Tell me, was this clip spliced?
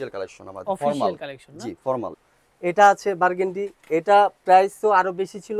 yes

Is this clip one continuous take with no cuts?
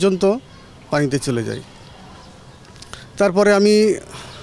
yes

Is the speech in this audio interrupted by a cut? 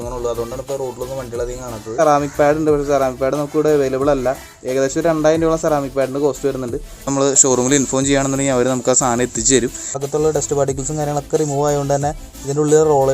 yes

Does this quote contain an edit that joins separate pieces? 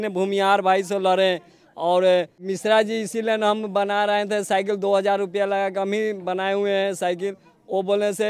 yes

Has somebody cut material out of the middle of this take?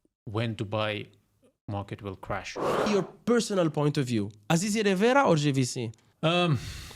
yes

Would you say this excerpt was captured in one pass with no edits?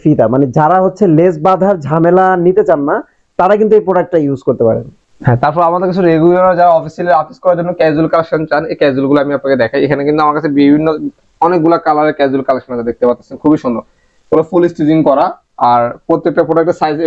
yes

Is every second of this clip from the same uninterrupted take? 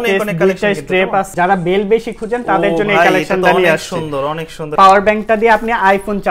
no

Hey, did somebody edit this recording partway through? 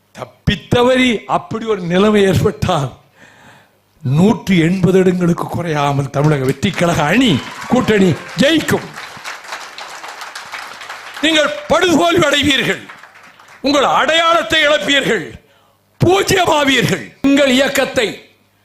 yes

